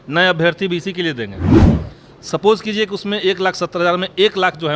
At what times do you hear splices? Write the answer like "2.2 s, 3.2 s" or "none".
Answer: 1.3 s, 1.8 s